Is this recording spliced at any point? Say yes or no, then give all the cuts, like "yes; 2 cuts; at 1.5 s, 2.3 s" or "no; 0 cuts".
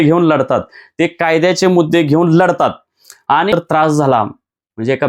yes; 1 cut; at 3.5 s